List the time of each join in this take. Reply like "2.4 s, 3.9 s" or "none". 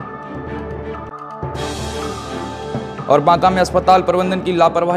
none